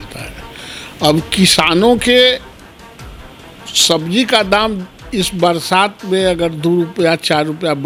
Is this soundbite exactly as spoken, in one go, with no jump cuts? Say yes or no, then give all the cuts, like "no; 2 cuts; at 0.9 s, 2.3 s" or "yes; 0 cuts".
yes; 0 cuts